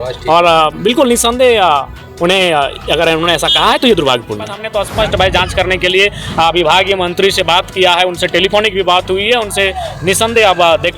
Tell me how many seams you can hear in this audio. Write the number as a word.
one